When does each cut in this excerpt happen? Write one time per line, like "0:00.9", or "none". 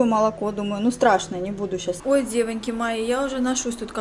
0:02.0